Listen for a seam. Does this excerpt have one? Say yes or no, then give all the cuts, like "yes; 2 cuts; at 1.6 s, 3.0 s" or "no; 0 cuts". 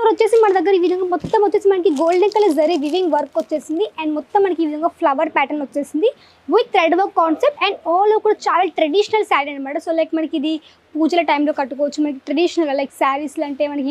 no; 0 cuts